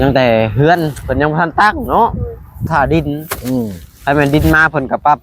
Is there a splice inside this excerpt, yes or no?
yes